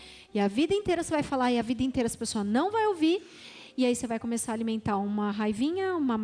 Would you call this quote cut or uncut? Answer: uncut